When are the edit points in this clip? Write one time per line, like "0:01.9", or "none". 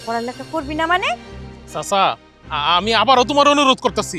0:01.5